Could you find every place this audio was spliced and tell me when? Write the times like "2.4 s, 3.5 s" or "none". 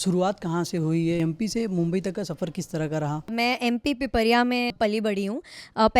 1.2 s, 3.3 s, 4.7 s